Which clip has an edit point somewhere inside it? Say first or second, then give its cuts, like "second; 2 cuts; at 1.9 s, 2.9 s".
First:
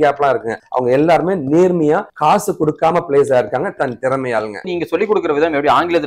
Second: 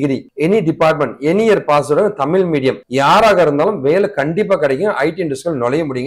first; 1 cut; at 4.7 s